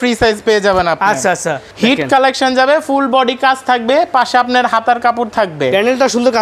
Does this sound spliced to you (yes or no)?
yes